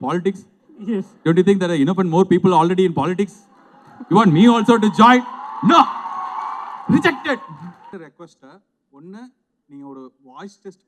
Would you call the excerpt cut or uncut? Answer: uncut